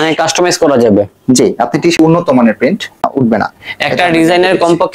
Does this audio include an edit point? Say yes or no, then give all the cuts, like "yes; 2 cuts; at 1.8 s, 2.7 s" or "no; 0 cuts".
yes; 2 cuts; at 1.9 s, 3.1 s